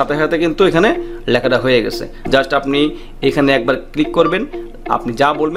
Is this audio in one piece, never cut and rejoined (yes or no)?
no